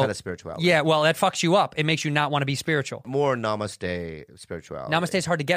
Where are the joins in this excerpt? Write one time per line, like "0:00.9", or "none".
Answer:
0:03.1